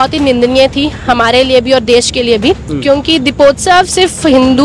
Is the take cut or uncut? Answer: uncut